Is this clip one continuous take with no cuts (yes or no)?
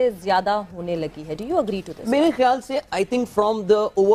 yes